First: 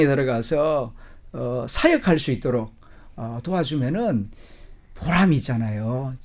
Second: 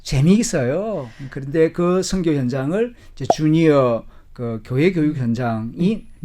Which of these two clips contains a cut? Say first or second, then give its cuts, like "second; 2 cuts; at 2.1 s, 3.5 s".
second; 1 cut; at 1.1 s